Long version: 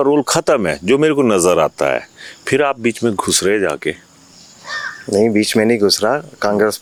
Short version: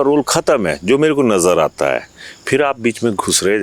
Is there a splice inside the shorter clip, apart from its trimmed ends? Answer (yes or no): no